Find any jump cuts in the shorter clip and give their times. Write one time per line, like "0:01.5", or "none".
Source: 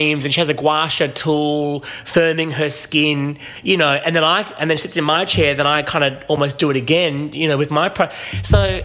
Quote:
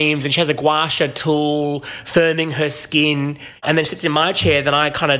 0:03.6